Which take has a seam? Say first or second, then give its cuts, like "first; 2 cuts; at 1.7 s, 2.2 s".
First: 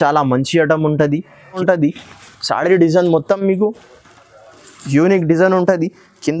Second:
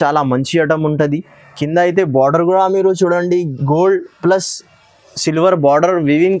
first; 1 cut; at 1.6 s